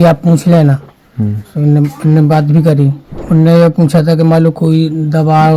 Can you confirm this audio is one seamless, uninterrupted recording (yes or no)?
no